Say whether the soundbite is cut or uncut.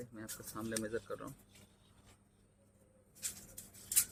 uncut